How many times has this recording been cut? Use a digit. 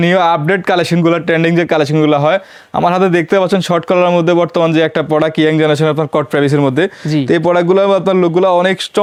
0